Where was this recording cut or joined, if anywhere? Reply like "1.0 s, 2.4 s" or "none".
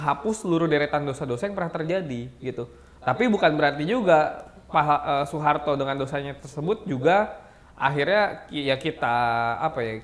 none